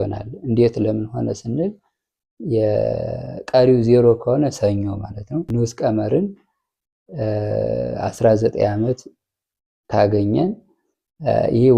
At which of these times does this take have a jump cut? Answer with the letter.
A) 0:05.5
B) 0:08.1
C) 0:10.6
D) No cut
A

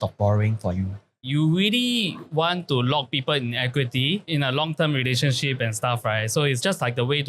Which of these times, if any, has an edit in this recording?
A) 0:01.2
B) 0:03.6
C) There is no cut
A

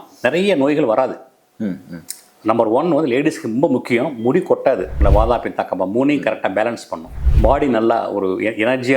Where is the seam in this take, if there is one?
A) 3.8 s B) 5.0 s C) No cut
B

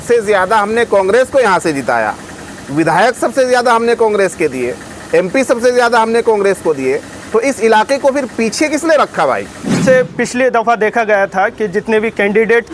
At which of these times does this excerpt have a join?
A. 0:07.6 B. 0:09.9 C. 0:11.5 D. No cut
B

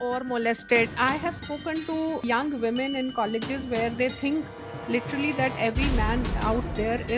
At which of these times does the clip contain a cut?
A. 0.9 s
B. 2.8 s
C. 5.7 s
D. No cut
A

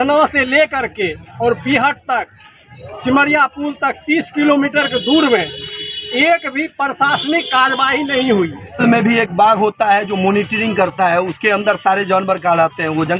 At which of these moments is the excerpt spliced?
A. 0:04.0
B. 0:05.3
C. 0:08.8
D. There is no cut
C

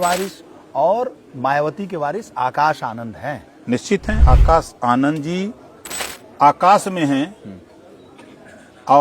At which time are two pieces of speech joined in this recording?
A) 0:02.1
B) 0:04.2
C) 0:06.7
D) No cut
B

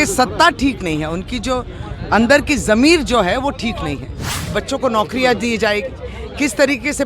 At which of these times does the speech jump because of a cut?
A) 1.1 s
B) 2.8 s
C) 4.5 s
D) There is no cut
C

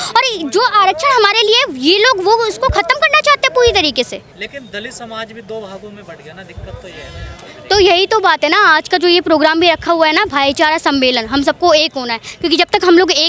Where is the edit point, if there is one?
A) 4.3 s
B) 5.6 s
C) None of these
C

